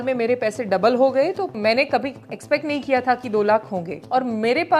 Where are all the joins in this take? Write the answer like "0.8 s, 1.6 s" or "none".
1.6 s, 3.9 s